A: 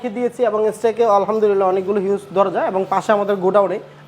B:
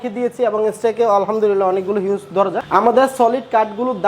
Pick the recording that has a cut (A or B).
B